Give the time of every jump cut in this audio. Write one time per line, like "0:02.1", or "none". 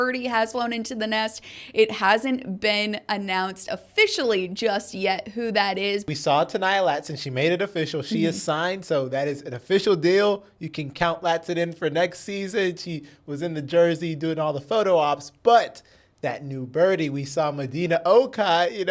0:06.1

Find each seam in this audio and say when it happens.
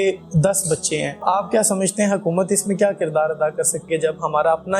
0:03.9

